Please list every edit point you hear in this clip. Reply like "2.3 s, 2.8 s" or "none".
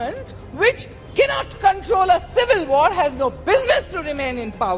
none